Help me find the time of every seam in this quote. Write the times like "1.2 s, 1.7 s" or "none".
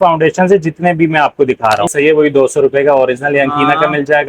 1.9 s